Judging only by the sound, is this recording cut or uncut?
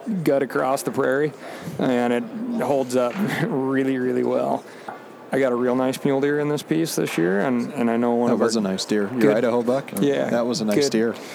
uncut